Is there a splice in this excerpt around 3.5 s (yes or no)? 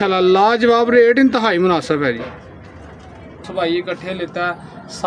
yes